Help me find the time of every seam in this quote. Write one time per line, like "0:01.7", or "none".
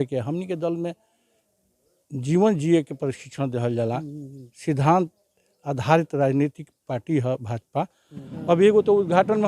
0:08.3